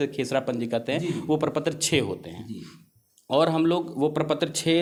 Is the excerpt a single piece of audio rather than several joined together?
yes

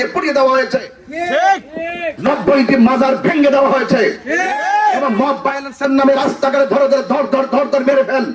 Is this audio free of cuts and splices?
yes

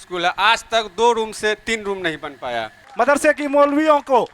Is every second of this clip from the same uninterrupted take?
no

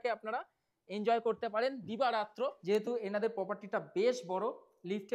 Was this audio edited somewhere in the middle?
yes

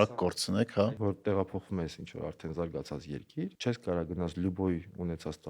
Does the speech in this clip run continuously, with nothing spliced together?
no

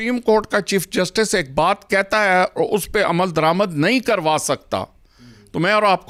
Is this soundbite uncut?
yes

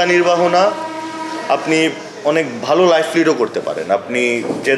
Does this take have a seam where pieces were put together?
no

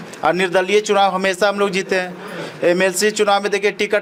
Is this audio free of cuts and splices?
yes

